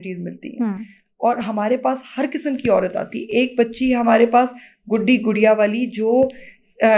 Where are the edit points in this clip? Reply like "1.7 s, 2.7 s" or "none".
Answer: none

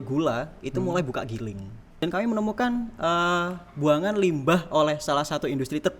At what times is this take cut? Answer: 1.8 s

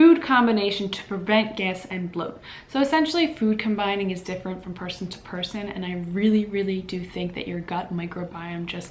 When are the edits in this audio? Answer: none

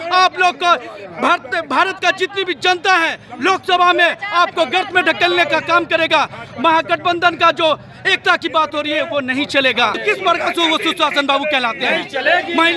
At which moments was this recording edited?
10.0 s

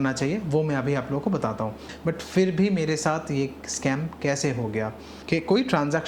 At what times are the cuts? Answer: 1.9 s, 5.1 s

